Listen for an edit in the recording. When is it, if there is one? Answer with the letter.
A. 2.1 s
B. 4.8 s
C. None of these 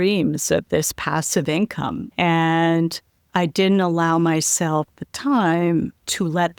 A